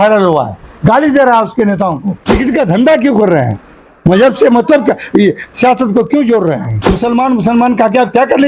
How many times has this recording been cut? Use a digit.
2